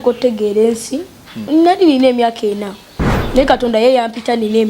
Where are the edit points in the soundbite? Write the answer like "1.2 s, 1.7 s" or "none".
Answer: 1.4 s